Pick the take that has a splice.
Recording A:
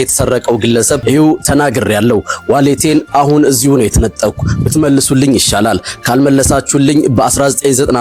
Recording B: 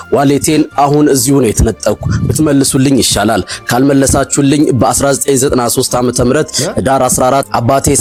A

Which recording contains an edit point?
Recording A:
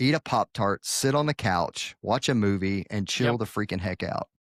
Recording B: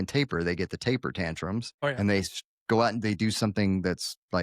B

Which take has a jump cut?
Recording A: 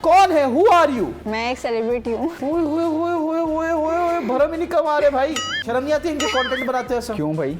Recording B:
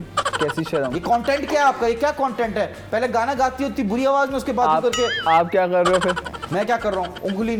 A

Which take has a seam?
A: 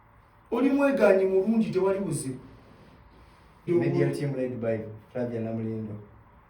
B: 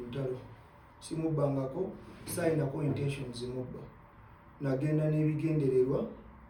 A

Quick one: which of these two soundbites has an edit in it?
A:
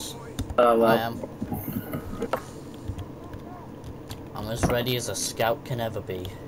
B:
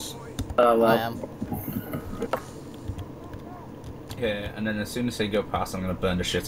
A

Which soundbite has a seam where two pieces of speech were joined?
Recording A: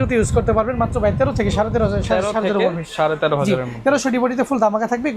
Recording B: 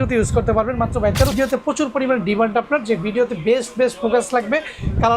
B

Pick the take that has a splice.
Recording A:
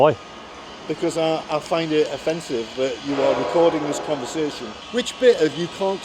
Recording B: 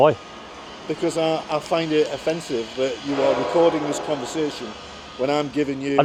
A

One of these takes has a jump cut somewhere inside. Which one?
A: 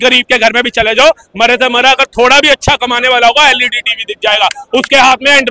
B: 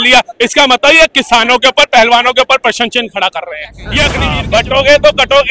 B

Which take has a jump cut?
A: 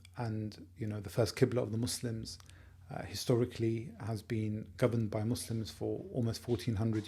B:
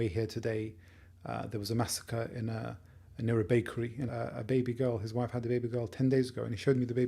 B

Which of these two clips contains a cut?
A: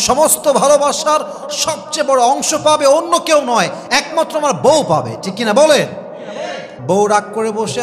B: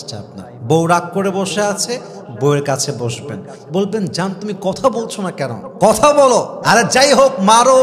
A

